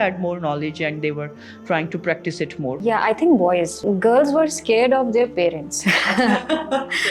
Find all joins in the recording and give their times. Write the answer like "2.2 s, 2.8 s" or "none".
2.8 s, 3.8 s